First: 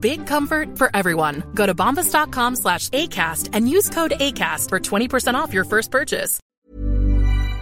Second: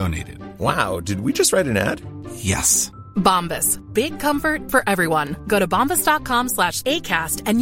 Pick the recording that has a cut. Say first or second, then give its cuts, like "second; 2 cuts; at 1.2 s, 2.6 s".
first; 1 cut; at 6.4 s